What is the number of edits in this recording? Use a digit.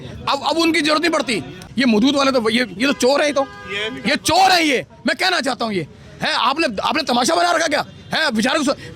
1